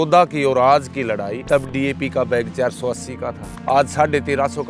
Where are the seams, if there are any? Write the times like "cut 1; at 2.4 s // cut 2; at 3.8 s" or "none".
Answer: cut 1; at 1.4 s // cut 2; at 3.5 s